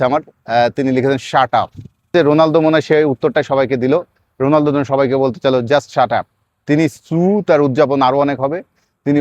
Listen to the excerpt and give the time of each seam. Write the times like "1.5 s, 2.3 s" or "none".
2.1 s